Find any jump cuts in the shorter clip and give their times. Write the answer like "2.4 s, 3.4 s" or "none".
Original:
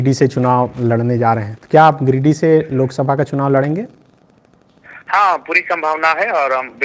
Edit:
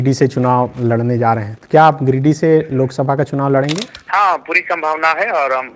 3.9 s